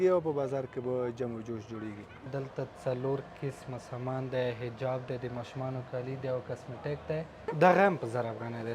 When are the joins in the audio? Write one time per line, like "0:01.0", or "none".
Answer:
0:02.3
0:07.5